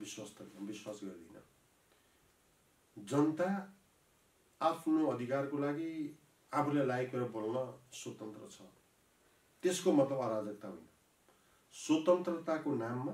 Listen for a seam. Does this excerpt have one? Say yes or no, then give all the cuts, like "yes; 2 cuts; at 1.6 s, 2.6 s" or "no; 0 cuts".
no; 0 cuts